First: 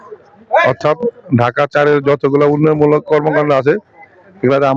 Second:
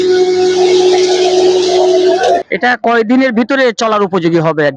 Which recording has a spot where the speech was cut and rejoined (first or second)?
second